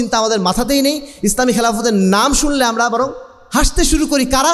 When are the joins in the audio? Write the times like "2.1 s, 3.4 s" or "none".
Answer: none